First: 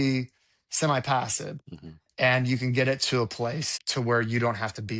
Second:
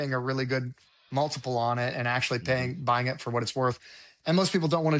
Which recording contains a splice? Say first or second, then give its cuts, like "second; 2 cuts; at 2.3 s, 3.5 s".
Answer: first; 1 cut; at 3.8 s